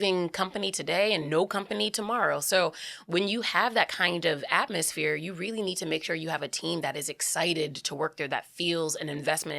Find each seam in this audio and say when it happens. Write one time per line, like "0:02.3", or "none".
none

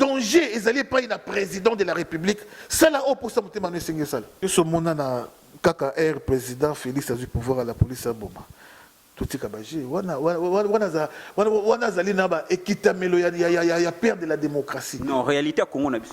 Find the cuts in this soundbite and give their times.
0:04.3

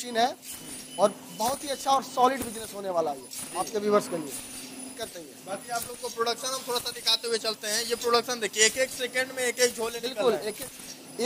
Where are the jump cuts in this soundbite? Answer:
0:04.9

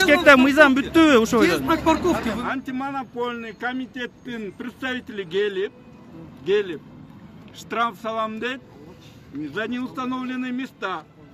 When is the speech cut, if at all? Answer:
0:02.4

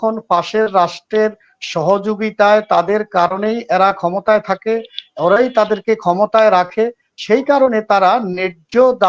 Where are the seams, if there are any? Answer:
none

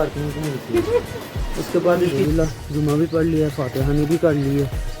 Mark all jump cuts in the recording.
0:02.2

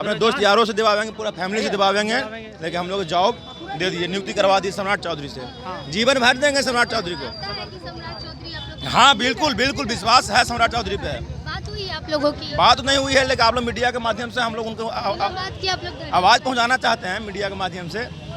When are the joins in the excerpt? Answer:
none

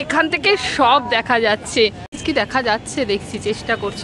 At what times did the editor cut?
0:02.2

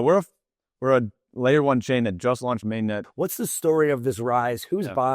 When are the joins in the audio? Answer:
0:03.0

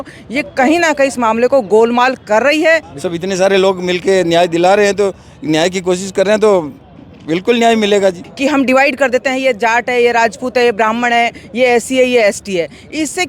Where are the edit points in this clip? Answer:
0:02.9
0:08.3

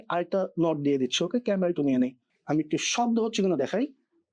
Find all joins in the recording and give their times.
0:02.3

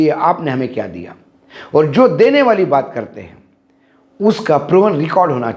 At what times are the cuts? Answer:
none

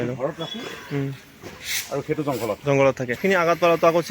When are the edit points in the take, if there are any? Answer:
0:03.2

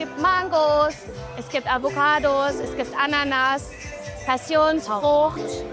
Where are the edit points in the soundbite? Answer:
none

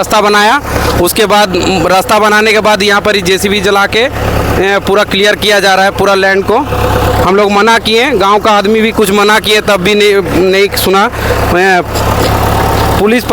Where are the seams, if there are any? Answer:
none

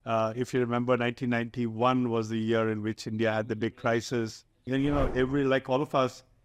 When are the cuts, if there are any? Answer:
0:04.7

